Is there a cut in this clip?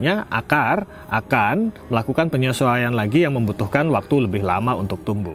no; 0 cuts

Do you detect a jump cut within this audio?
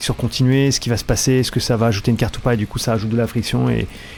no; 0 cuts

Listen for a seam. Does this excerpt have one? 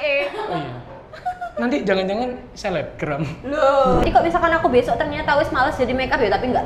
yes; 1 cut; at 4.0 s

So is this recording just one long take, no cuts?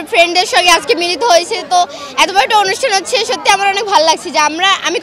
yes; 0 cuts

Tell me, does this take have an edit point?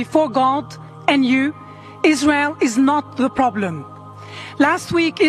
no; 0 cuts

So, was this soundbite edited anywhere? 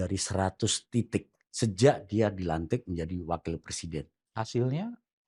no; 0 cuts

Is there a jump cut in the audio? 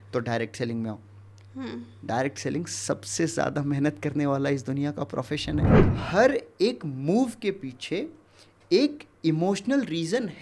yes; 1 cut; at 6.0 s

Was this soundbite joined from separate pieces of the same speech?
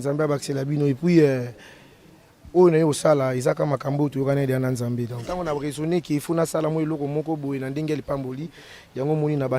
yes; 1 cut; at 5.2 s

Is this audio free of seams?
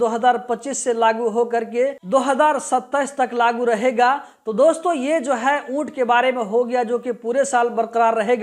yes; 0 cuts

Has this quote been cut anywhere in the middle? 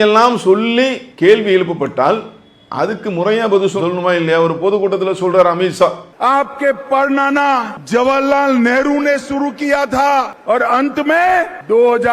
yes; 1 cut; at 6.1 s

